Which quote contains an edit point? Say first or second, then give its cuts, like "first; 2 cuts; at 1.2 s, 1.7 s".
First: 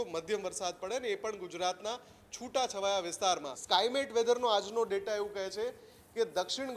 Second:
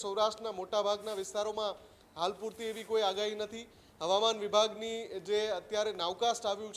first; 1 cut; at 3.5 s